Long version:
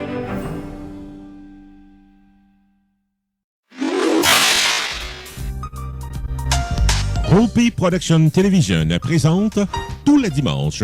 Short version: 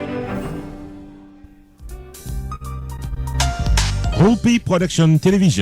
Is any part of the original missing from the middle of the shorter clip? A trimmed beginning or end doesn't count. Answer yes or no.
yes